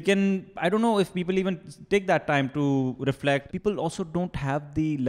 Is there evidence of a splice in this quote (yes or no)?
yes